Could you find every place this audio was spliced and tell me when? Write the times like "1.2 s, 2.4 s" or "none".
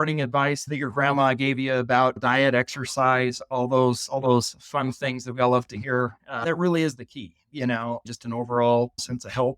6.4 s